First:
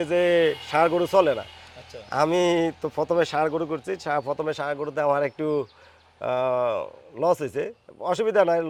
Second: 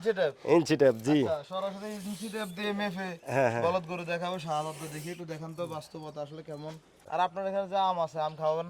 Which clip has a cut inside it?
second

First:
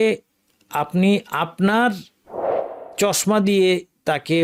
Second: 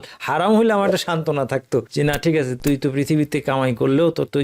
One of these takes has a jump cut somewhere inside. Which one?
second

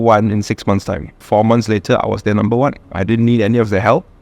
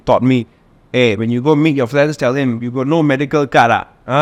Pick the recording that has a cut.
first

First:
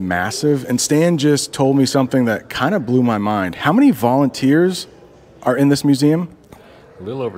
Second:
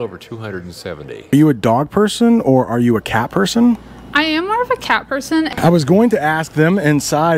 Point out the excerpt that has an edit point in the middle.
second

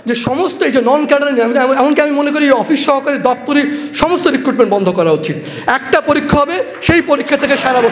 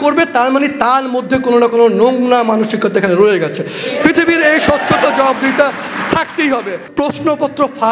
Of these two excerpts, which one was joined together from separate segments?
second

